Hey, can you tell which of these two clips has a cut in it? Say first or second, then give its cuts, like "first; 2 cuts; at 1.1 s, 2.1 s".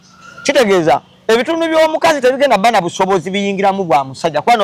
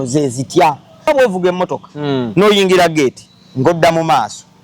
second; 1 cut; at 1.1 s